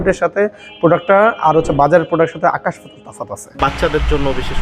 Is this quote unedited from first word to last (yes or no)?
no